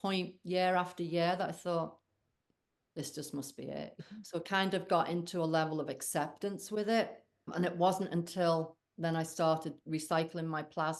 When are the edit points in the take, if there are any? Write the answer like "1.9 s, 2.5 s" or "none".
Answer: 3.9 s, 7.5 s